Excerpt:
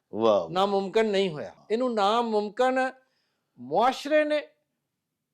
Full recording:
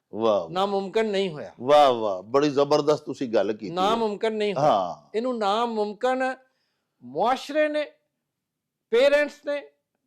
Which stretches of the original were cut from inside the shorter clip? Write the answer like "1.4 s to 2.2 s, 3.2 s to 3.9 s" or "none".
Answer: 1.5 s to 5.0 s